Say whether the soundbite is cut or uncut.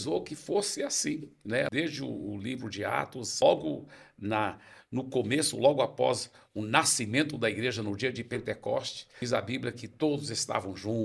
cut